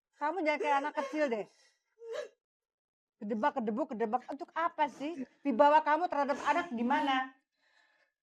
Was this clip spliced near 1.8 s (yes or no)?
no